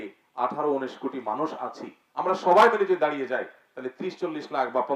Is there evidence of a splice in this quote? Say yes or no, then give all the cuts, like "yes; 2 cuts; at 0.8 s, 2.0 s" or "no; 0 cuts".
no; 0 cuts